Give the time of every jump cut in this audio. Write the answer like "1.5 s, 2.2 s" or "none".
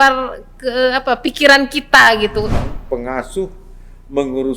2.6 s